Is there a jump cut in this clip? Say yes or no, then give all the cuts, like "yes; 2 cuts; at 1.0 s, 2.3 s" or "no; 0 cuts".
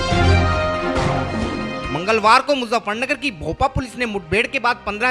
no; 0 cuts